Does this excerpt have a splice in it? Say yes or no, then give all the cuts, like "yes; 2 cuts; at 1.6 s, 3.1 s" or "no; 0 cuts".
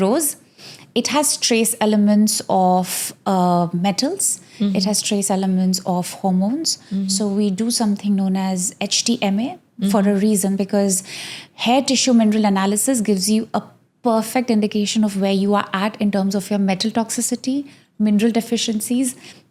no; 0 cuts